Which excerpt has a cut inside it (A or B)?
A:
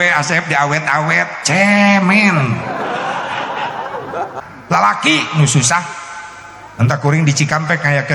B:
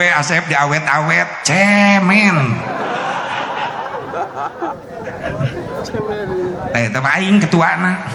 A